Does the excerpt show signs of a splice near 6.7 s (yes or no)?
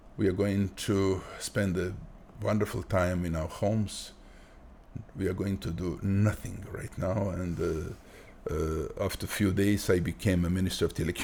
no